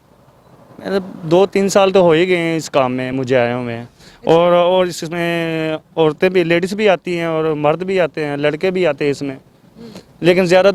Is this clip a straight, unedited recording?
yes; 0 cuts

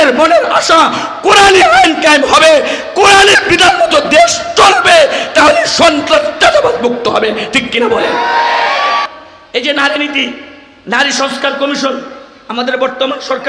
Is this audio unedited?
no; 1 cut; at 9.1 s

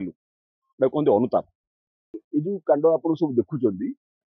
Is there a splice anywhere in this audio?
yes; 1 cut; at 2.2 s

